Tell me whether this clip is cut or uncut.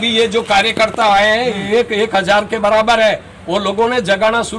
uncut